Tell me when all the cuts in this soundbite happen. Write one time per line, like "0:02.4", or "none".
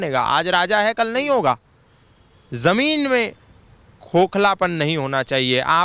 none